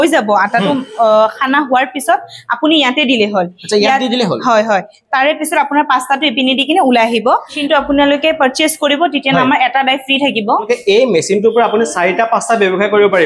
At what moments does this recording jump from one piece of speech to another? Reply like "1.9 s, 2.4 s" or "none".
7.6 s, 10.7 s